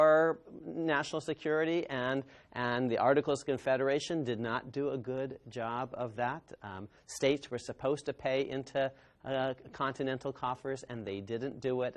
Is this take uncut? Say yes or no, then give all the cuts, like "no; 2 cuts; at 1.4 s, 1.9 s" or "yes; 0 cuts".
yes; 0 cuts